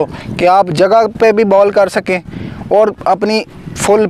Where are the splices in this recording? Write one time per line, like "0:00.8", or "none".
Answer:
none